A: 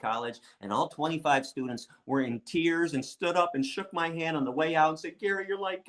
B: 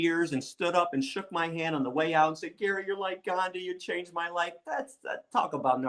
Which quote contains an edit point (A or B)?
B